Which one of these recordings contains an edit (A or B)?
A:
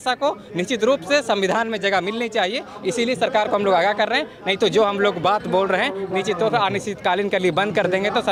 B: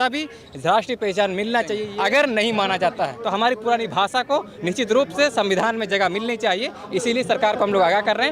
B